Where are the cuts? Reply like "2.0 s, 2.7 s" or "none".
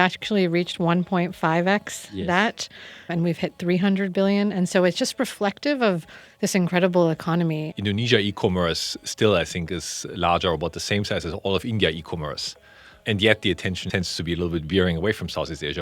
3.1 s, 7.7 s, 13.8 s